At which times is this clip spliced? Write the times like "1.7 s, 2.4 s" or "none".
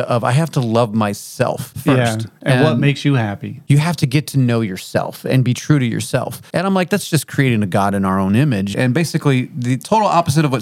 1.7 s, 3.5 s, 6.4 s, 8.7 s